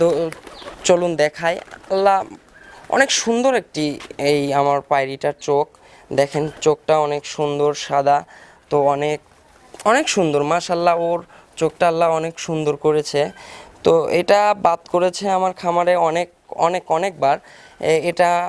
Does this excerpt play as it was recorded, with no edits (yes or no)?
yes